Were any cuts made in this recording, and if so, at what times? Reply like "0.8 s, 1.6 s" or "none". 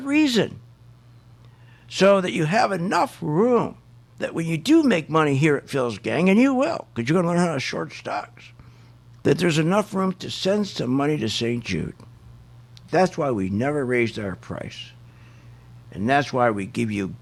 none